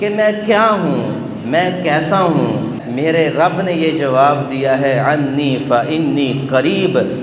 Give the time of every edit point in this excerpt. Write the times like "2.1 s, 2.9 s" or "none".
2.8 s